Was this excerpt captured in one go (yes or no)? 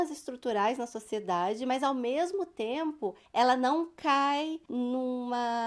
no